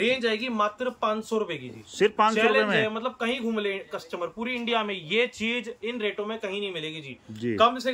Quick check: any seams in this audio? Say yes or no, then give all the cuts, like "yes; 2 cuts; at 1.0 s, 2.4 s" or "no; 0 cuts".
no; 0 cuts